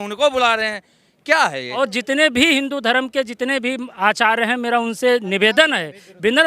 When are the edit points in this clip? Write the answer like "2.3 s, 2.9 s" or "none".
1.8 s